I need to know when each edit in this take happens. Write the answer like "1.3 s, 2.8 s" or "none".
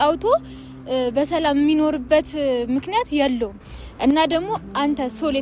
none